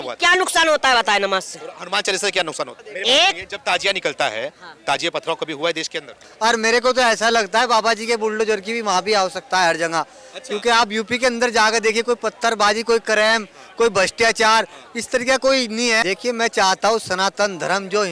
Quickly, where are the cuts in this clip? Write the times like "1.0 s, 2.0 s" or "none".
2.8 s, 6.2 s, 16.0 s